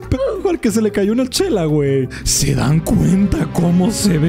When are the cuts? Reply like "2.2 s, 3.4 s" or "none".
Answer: 2.1 s